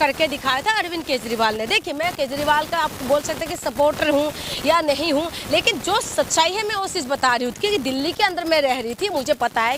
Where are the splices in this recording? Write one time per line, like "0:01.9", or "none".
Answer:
none